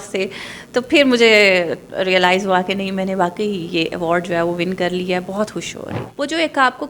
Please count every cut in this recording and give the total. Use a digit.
1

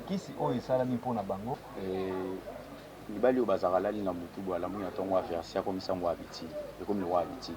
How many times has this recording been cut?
1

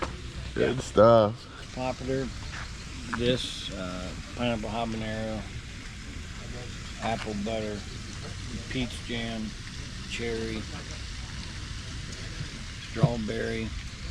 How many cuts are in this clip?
1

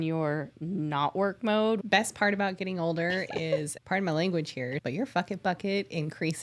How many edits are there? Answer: 3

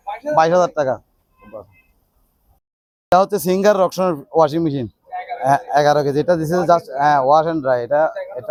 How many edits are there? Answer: 0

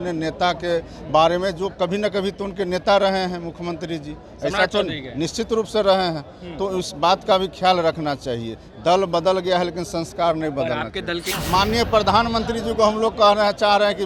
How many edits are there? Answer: 1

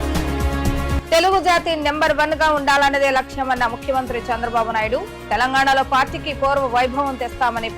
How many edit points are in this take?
1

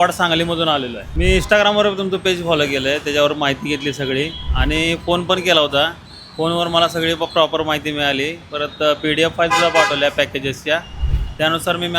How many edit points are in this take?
1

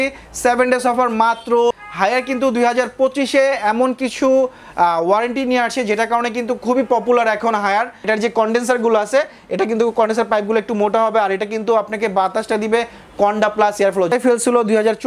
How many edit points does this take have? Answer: 3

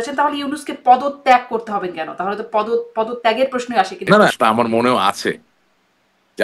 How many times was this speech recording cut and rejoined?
1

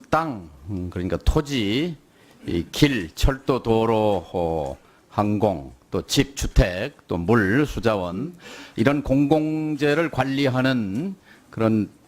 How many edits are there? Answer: 1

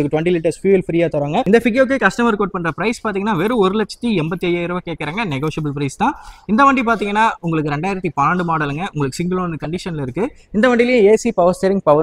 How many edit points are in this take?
1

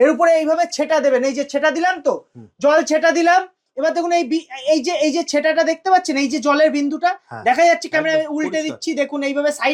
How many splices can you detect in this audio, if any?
0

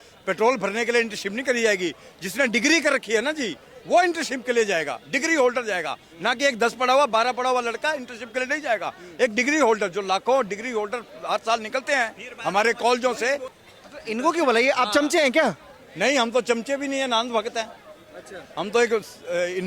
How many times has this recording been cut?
1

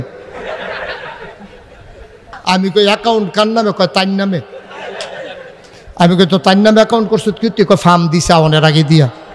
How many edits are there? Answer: 1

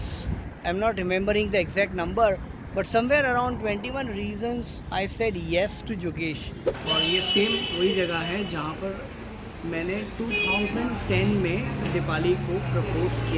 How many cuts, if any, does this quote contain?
1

